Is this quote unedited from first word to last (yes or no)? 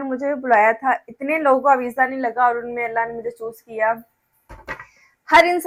yes